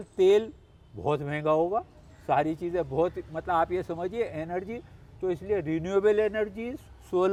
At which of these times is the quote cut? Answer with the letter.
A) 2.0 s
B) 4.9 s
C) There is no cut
C